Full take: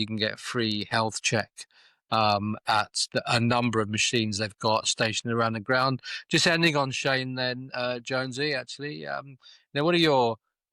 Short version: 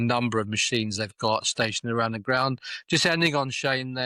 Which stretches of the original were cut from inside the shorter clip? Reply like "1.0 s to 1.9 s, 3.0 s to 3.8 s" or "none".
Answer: none